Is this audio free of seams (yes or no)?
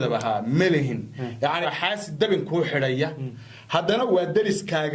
no